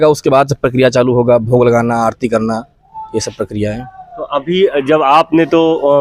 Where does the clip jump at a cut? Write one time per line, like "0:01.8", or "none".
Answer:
none

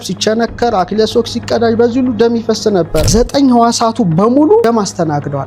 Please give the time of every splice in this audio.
0:03.1
0:04.6

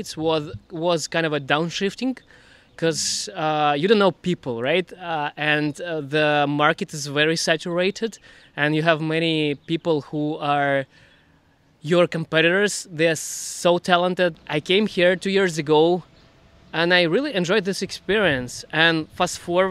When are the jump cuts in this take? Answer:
0:14.4

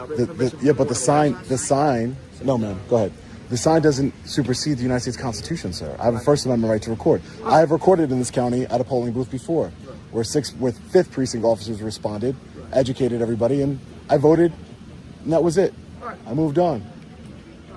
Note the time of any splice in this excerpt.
none

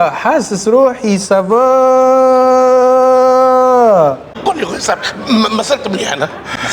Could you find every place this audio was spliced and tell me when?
0:04.4

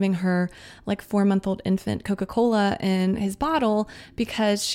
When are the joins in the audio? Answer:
none

